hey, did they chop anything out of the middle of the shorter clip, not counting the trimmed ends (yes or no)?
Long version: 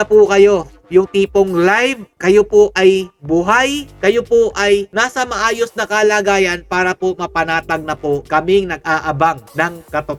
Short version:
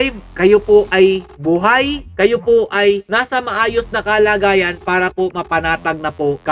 no